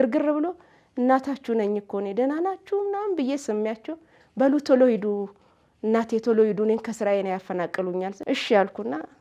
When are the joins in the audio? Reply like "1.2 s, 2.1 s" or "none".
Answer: 8.2 s